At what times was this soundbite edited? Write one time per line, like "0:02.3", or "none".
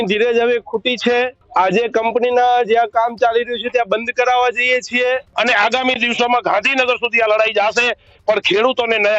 0:01.4
0:05.3